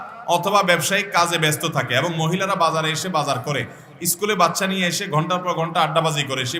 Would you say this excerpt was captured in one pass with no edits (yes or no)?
yes